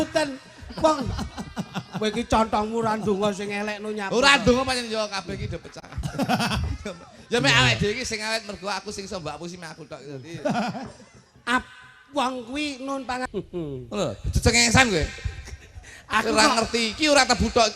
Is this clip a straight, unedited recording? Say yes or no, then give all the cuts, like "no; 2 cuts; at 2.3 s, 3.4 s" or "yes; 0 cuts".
no; 1 cut; at 13.3 s